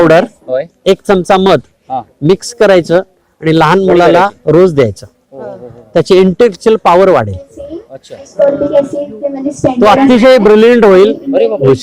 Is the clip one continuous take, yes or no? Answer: yes